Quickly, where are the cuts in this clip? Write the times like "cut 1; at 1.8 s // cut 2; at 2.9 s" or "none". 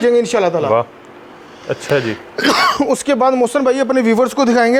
none